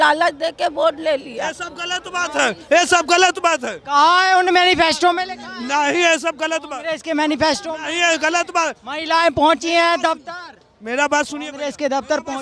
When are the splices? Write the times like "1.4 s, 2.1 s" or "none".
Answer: none